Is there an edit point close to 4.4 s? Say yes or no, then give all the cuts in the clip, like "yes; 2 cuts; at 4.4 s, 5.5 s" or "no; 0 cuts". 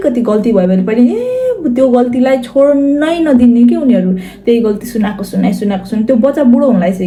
no; 0 cuts